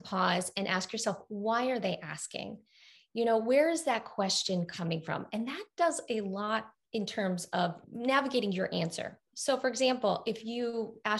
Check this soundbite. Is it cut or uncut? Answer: cut